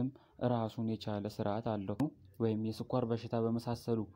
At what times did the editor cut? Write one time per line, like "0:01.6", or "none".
0:02.0